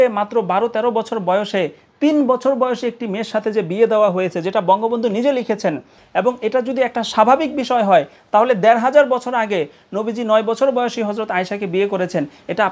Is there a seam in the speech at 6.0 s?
yes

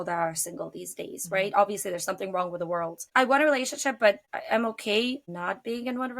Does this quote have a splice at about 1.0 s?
no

